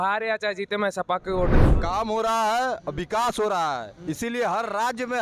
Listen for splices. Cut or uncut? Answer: cut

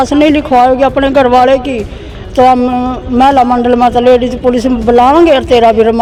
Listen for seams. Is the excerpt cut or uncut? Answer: uncut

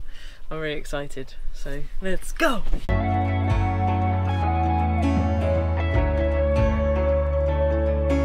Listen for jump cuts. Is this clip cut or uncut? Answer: uncut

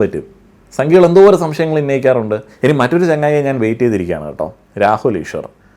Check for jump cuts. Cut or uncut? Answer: cut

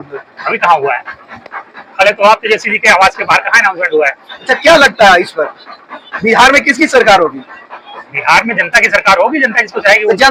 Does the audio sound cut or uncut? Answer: uncut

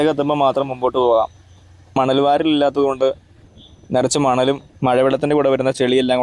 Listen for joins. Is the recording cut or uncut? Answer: cut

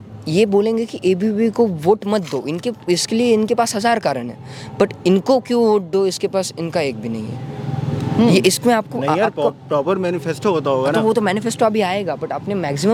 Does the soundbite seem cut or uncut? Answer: uncut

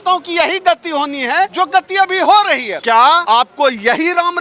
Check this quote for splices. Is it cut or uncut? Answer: cut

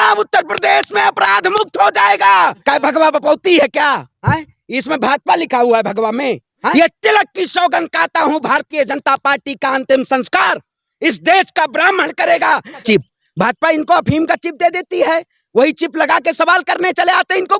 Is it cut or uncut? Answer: cut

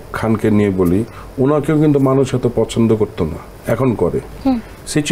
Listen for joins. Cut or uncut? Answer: uncut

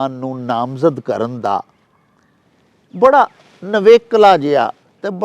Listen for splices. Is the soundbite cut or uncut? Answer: uncut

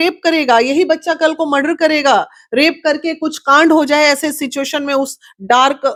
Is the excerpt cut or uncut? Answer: uncut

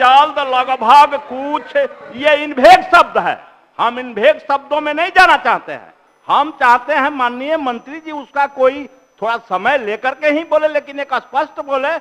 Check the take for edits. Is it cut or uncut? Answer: uncut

